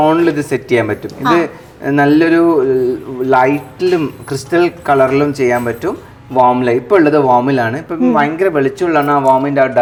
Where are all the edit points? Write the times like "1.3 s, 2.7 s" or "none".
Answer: none